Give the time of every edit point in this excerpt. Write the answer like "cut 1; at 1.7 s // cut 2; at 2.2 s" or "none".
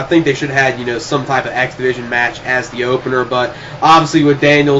cut 1; at 3.1 s